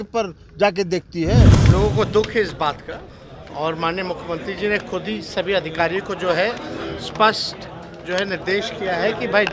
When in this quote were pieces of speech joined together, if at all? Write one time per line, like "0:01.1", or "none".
0:01.6